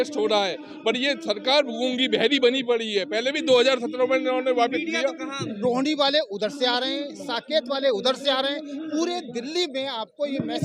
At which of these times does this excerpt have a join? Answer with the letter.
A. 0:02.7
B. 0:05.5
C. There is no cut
B